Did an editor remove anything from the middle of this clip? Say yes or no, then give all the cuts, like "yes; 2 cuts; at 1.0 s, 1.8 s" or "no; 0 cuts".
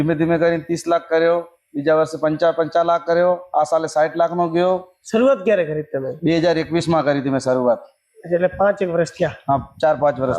no; 0 cuts